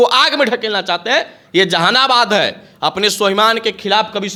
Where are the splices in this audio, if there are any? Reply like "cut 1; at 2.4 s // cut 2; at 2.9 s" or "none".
none